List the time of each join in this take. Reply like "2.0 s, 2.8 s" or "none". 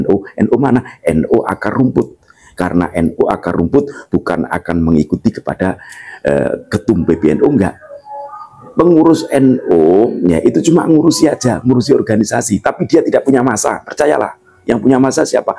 none